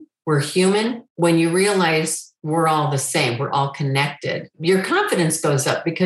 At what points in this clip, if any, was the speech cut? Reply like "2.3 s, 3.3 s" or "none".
1.0 s